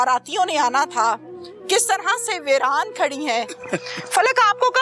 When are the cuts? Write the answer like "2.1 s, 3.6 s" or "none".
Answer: 3.6 s